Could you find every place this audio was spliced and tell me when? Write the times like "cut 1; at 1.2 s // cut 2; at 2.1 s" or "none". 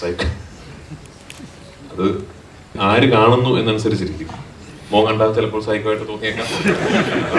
cut 1; at 2.8 s